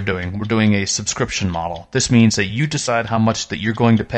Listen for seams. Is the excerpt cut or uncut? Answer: uncut